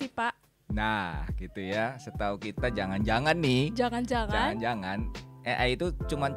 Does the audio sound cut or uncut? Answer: uncut